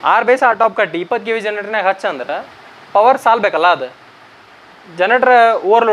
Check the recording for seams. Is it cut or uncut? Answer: uncut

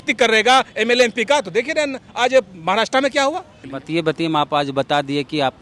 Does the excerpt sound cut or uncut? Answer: cut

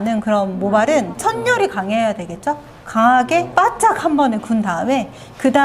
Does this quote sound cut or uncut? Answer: cut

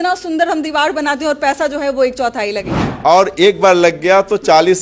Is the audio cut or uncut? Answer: cut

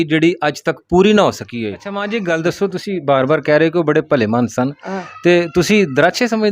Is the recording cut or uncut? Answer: cut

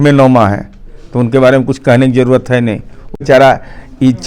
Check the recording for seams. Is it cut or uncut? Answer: cut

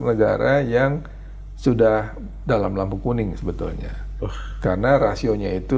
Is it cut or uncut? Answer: uncut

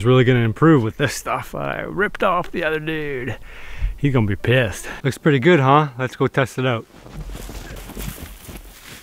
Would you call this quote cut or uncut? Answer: cut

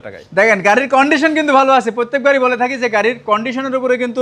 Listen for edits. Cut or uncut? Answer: uncut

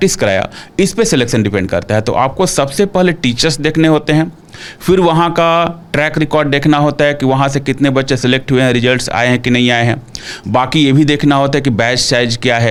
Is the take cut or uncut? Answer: uncut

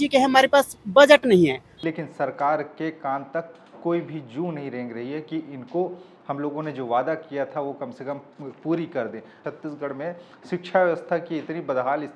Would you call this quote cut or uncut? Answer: cut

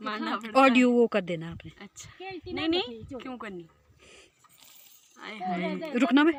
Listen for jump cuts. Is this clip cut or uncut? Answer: uncut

